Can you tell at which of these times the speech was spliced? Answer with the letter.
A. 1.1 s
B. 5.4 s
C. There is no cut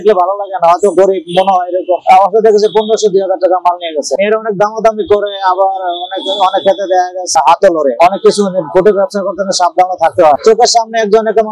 C